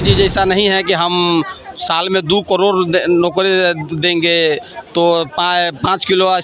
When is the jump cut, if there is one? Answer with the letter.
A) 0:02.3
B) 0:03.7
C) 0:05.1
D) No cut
D